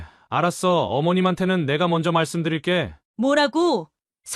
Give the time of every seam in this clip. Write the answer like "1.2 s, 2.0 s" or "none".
3.0 s